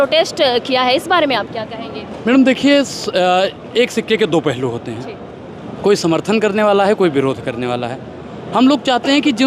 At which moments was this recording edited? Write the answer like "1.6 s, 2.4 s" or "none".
none

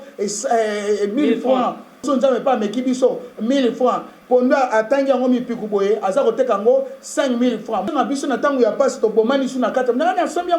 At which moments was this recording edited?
2.1 s, 7.9 s

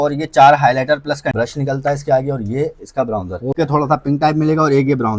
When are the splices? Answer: 1.3 s, 3.5 s

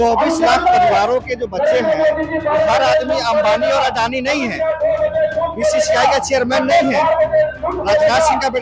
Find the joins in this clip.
none

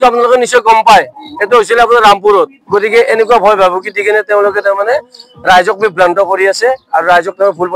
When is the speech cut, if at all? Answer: 2.6 s

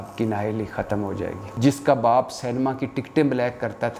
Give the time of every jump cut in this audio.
1.5 s

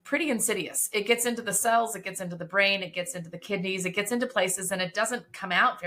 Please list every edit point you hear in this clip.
none

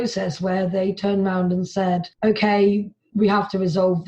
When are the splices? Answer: 2.1 s

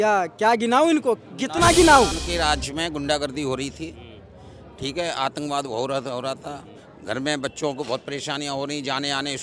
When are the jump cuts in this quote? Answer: 2.2 s

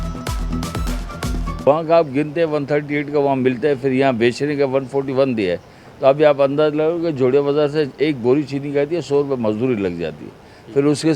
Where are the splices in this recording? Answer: 1.3 s

